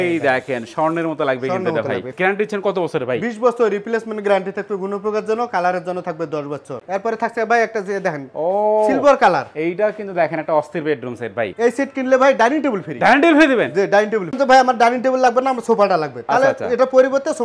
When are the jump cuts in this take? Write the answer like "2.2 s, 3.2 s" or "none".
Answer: 2.1 s, 6.8 s, 11.5 s, 14.4 s

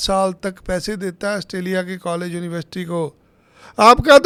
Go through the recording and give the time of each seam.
none

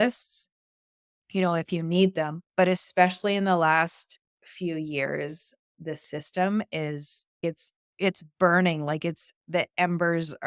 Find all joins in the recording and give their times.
2.4 s, 5.7 s, 7.4 s

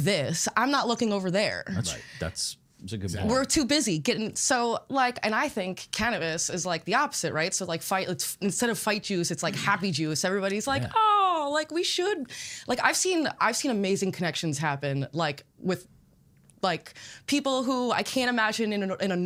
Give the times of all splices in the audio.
none

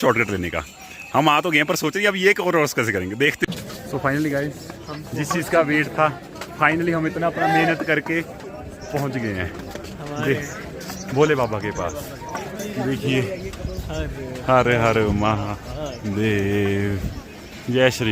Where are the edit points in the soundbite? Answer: 3.4 s

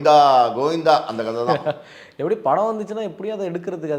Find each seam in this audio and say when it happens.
none

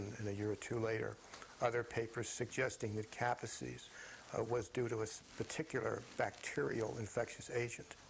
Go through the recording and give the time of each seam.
1.0 s

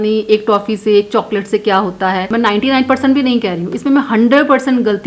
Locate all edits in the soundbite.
2.3 s

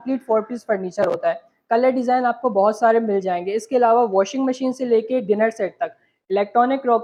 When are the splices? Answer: none

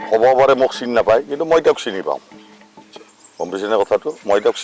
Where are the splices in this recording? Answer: none

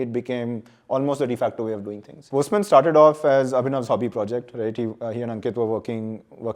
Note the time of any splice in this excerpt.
2.2 s

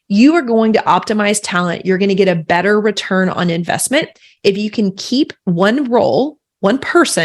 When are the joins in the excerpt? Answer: 5.4 s

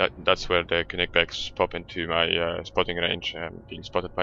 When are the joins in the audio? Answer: 1.8 s

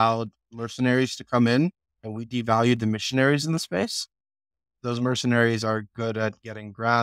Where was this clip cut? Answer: 4.7 s

